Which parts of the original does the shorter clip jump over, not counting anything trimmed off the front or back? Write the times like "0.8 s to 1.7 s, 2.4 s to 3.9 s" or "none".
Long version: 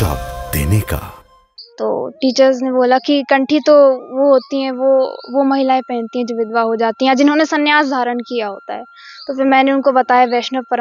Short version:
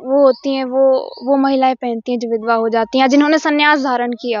none